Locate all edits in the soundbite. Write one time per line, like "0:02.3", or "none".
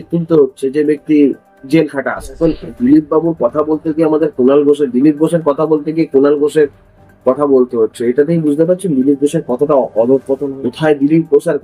0:02.4
0:10.5